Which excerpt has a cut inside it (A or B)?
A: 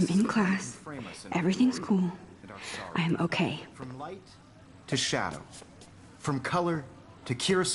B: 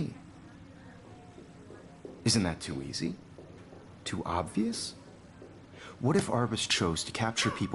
A